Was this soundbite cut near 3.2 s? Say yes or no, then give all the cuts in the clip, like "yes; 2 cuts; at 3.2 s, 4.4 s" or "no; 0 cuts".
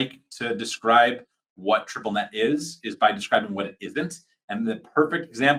no; 0 cuts